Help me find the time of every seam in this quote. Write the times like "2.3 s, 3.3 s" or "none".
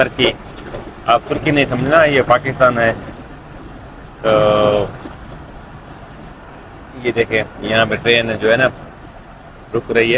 none